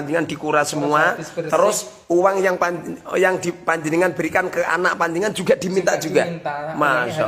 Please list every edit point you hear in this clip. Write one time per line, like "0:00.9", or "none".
none